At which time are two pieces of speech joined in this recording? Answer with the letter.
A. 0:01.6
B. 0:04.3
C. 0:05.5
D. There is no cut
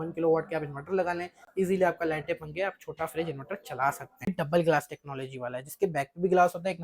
B